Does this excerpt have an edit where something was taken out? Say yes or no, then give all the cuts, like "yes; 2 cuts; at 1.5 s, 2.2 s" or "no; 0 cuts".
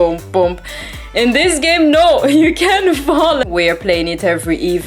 yes; 1 cut; at 3.5 s